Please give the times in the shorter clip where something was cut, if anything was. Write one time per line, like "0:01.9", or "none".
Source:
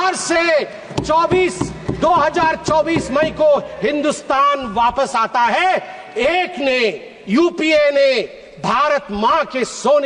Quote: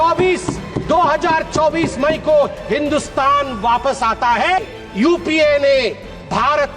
0:04.6